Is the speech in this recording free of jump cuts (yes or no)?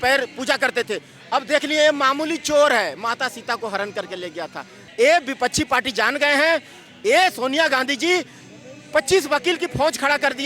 no